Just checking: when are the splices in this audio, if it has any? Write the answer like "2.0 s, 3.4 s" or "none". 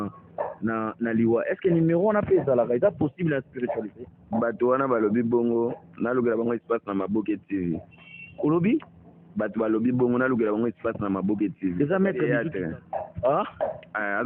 12.3 s